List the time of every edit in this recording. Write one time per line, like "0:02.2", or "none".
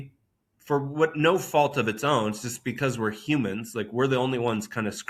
none